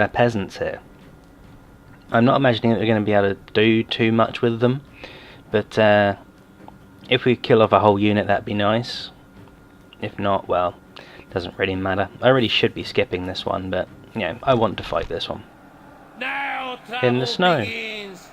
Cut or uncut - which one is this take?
cut